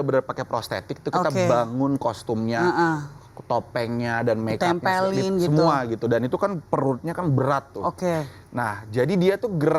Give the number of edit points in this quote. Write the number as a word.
zero